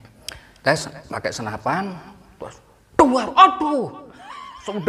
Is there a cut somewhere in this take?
no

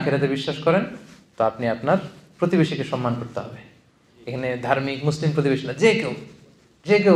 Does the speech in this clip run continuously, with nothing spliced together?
yes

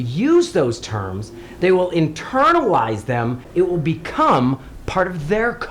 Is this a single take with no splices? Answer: no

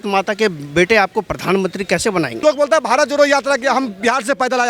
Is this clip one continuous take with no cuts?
no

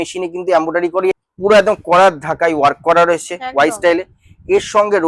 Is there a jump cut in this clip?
yes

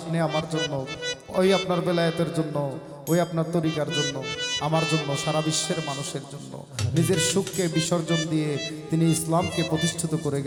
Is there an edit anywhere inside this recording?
no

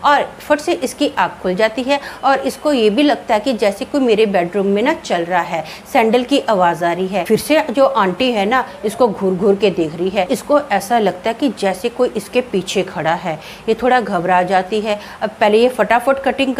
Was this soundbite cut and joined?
yes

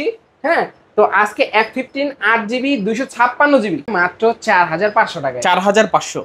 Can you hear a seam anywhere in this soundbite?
yes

